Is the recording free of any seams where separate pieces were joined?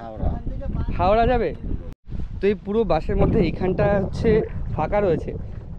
no; 1 cut; at 1.9 s

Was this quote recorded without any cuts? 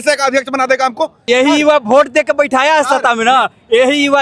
no; 1 cut; at 1.2 s

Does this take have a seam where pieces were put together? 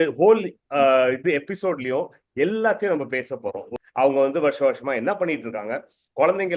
yes; 1 cut; at 3.7 s

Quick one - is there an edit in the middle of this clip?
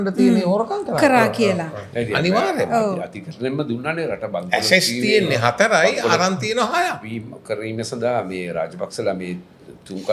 no; 0 cuts

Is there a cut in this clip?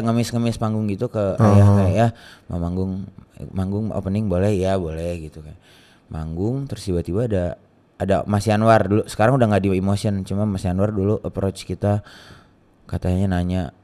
no; 0 cuts

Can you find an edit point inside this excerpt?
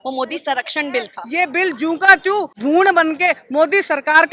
yes; 2 cuts; at 1.2 s, 2.5 s

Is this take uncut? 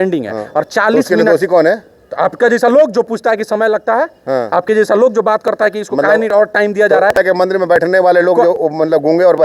no; 1 cut; at 7.2 s

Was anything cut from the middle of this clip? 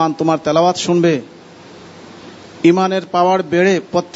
no; 0 cuts

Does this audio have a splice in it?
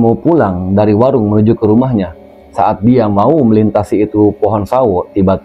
no; 0 cuts

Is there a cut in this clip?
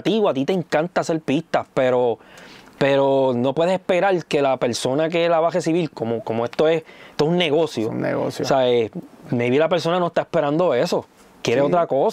no; 0 cuts

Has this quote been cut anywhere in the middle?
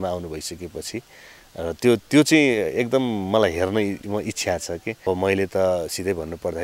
yes; 1 cut; at 5.1 s

